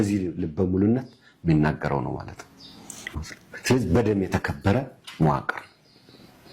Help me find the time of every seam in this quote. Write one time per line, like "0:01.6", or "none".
0:03.1